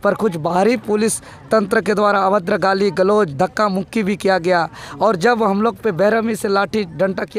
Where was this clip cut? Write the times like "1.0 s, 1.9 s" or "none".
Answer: none